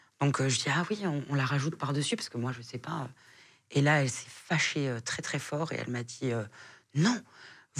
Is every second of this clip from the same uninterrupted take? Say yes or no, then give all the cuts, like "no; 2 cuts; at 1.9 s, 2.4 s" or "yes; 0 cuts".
yes; 0 cuts